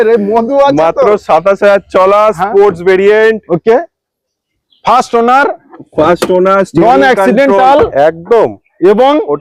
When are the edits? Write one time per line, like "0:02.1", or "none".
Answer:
none